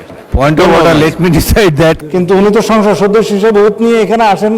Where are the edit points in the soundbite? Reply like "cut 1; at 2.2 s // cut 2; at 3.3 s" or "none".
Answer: cut 1; at 2.0 s